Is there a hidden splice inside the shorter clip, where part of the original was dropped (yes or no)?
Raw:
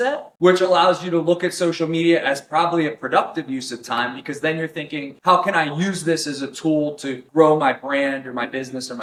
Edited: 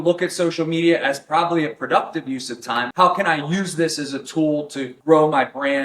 yes